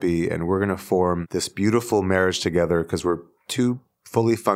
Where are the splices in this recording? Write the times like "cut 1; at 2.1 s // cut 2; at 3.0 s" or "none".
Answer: cut 1; at 1.2 s